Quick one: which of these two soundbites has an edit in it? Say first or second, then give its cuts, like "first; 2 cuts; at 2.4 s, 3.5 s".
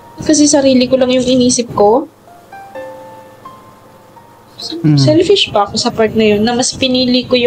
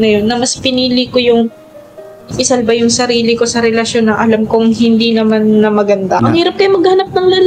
second; 1 cut; at 6.2 s